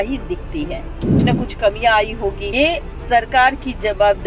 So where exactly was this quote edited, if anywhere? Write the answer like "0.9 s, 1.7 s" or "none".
1.1 s